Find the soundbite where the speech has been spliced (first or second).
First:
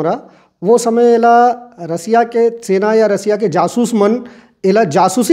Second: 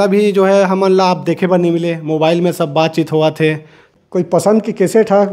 second